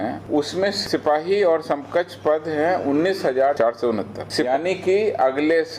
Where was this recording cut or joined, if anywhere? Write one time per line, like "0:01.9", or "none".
0:04.5